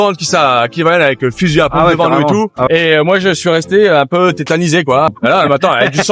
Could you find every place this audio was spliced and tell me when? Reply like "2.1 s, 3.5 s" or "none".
2.7 s, 5.1 s